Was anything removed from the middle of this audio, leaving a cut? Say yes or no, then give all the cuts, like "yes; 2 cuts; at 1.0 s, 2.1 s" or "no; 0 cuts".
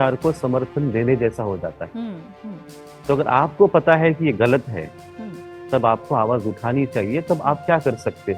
no; 0 cuts